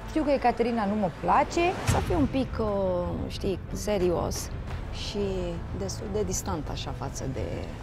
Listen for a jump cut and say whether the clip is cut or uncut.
cut